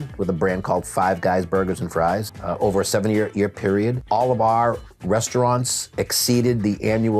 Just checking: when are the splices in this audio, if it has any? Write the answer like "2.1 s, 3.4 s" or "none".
2.3 s, 4.0 s